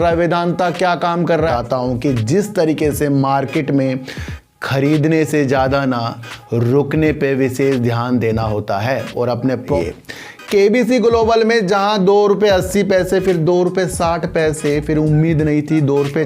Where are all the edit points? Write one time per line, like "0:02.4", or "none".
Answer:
0:01.5
0:09.8